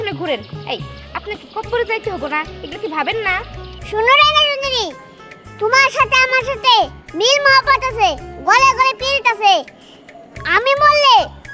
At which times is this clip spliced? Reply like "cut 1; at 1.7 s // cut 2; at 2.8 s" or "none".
none